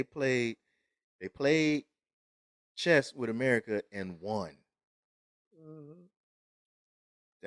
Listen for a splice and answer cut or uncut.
uncut